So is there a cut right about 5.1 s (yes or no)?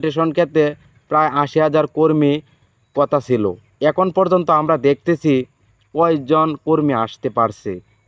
no